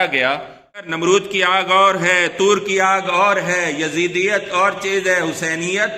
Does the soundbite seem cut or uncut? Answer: cut